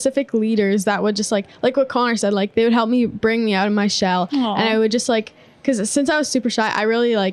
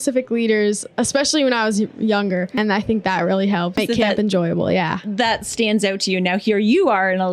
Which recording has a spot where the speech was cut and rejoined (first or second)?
second